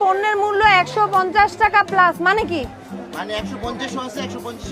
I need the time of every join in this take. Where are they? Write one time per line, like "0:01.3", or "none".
0:01.5

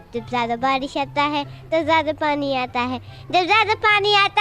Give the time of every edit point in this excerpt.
none

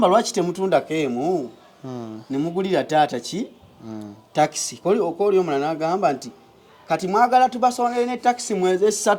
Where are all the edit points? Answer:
none

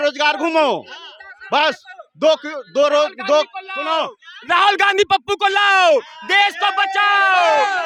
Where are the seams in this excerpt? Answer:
none

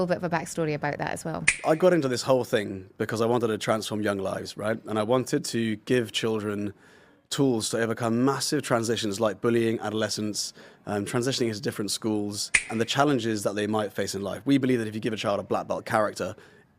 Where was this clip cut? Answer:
0:01.5
0:12.7

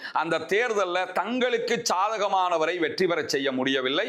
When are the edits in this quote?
none

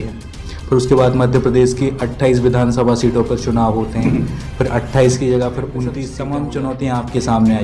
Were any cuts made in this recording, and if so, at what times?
0:06.0

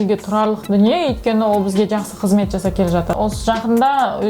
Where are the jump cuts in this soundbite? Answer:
0:03.1

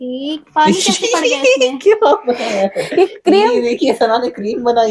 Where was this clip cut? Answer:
none

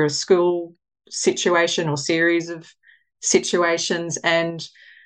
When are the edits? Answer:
none

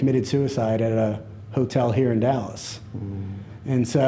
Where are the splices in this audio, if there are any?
none

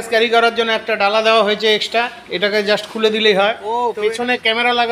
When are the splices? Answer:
0:03.8

